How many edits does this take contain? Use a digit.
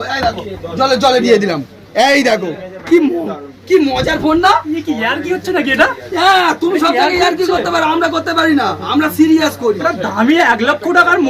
0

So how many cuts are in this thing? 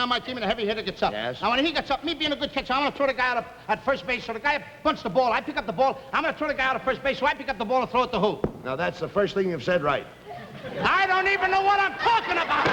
0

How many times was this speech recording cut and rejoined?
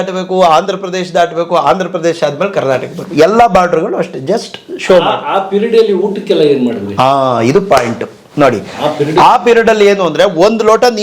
0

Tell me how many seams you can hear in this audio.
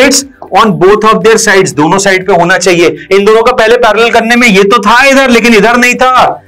0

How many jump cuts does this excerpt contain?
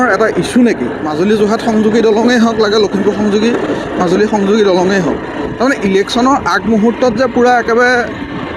1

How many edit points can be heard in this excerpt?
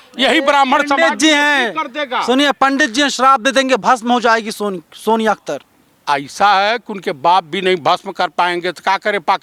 0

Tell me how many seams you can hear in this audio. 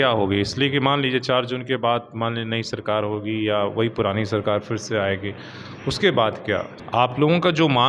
1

